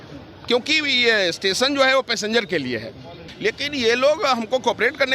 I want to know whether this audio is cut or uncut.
cut